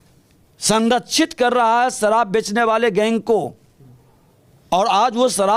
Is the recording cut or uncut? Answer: uncut